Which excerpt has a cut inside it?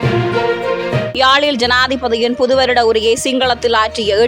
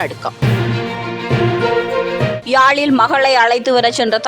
first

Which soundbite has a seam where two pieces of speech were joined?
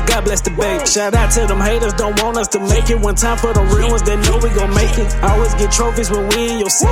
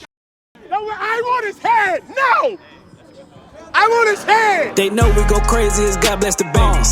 second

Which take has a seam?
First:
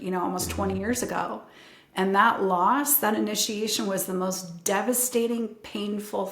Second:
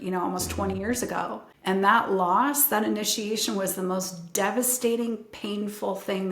second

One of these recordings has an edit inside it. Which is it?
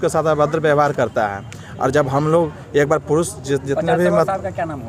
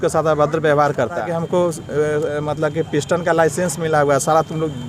second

